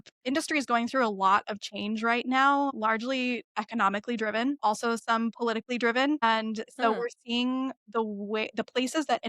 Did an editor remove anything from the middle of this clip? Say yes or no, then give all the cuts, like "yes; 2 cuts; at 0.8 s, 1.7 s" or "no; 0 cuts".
yes; 3 cuts; at 2.8 s, 4.6 s, 6.2 s